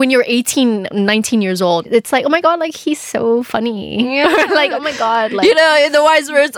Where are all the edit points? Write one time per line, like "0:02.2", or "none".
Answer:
0:01.9

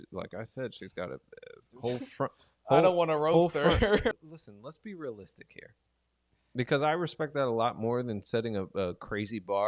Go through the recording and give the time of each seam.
0:04.1

